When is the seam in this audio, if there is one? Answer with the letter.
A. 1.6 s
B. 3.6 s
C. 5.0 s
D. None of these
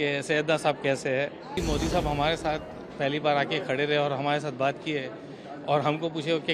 A